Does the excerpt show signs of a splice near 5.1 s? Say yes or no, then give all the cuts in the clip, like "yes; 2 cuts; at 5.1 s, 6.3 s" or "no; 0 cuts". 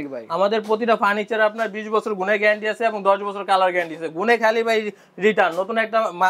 no; 0 cuts